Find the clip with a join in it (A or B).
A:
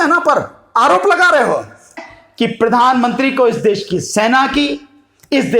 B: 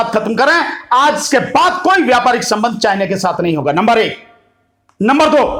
A